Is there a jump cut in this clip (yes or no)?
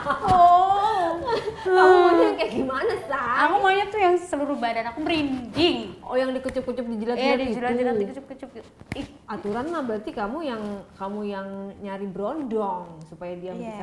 no